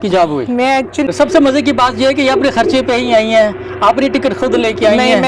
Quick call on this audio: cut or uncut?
cut